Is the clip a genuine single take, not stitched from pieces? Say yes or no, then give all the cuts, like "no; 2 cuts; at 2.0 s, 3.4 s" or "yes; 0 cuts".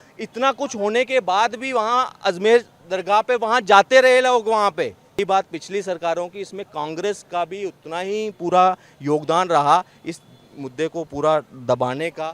no; 1 cut; at 5.2 s